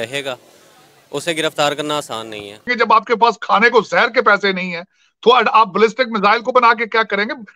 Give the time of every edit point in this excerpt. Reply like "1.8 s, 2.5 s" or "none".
2.7 s